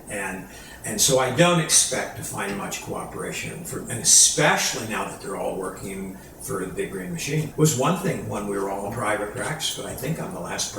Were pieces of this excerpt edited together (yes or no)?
yes